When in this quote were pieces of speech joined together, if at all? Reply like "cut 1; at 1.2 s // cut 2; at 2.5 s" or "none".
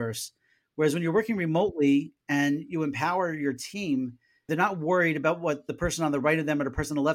cut 1; at 4.5 s // cut 2; at 5.7 s